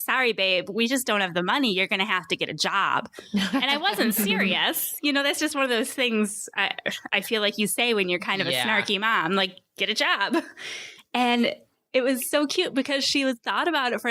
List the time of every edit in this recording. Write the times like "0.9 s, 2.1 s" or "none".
none